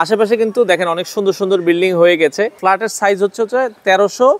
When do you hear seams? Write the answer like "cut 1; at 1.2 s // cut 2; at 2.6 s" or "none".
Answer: cut 1; at 2.5 s